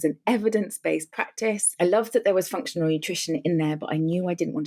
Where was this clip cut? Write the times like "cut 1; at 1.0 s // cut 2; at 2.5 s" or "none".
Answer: cut 1; at 1.7 s

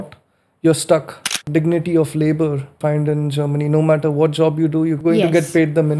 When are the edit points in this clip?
cut 1; at 1.4 s // cut 2; at 2.7 s // cut 3; at 5.0 s

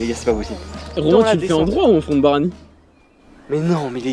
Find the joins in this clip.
cut 1; at 1.0 s

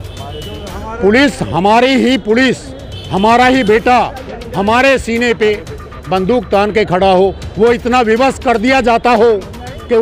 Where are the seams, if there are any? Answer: none

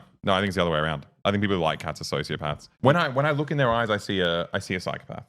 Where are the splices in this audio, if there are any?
none

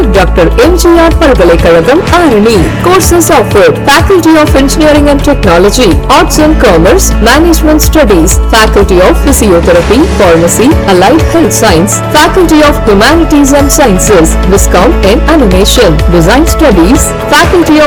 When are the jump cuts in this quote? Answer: none

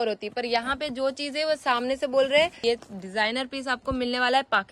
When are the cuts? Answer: cut 1; at 2.6 s

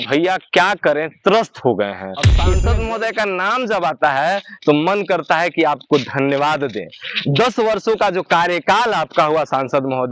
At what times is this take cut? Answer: cut 1; at 2.4 s

